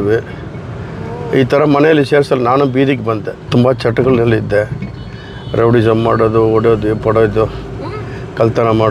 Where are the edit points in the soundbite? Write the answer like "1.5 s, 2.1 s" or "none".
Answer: 3.3 s